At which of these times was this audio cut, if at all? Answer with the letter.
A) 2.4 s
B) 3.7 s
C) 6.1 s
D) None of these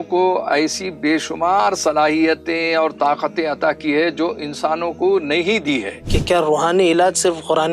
C